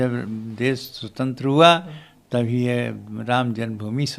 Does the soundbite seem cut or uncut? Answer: uncut